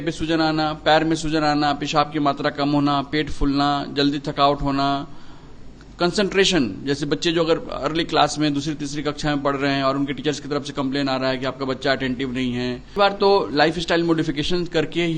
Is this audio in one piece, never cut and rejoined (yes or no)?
no